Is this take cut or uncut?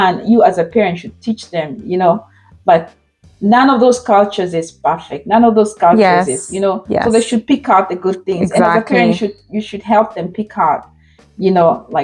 uncut